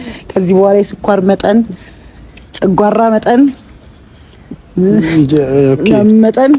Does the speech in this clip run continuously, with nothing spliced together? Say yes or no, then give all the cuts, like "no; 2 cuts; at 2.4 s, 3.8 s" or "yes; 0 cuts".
yes; 0 cuts